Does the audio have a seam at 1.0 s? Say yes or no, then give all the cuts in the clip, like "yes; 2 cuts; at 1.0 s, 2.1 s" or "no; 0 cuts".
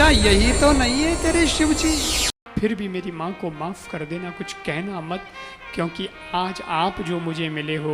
no; 1 cut; at 2.3 s